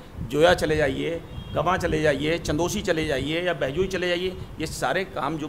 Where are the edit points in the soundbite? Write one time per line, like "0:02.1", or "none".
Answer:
none